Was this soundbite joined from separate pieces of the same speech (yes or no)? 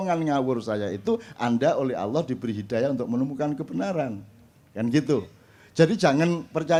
no